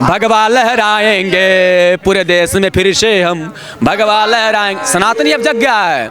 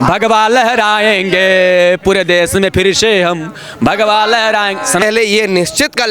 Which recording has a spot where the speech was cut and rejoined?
second; 1 cut; at 5.0 s

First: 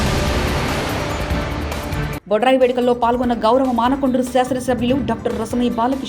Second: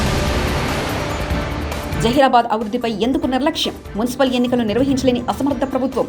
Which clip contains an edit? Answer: second; 1 cut; at 1.7 s

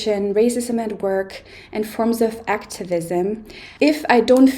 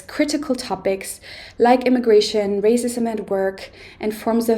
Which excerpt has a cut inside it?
first; 1 cut; at 3.6 s

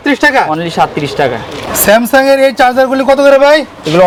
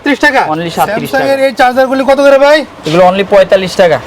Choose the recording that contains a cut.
second; 1 cut; at 1.0 s

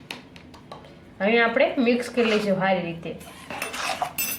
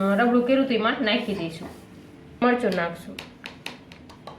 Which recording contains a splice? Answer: second; 1 cut; at 2.4 s

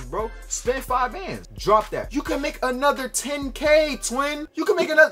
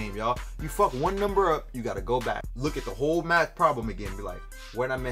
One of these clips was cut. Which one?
first; 2 cuts; at 1.5 s, 2.1 s

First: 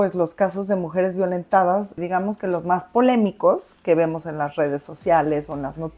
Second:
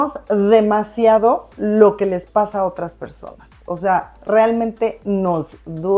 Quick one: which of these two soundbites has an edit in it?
first; 1 cut; at 2.0 s

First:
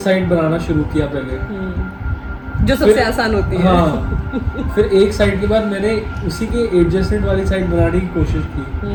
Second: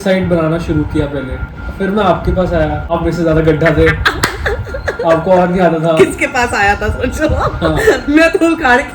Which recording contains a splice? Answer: second; 2 cuts; at 1.6 s, 2.9 s

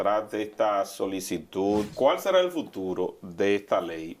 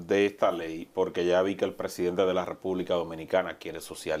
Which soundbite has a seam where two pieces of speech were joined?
first; 1 cut; at 1.9 s

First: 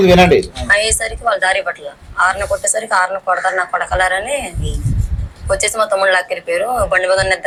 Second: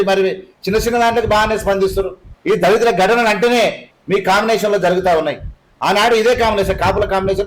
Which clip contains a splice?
second; 2 cuts; at 2.3 s, 3.9 s

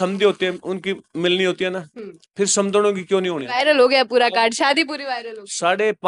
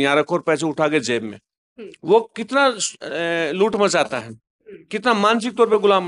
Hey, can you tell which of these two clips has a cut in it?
first; 1 cut; at 3.4 s

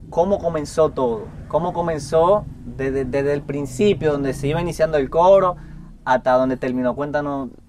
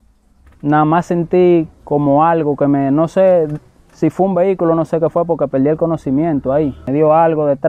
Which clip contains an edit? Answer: second; 1 cut; at 6.8 s

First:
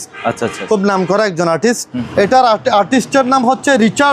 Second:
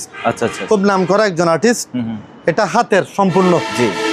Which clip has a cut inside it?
first; 1 cut; at 2.0 s

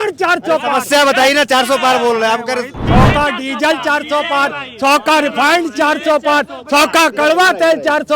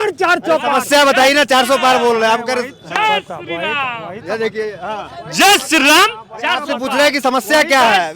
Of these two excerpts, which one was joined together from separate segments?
first; 1 cut; at 2.8 s

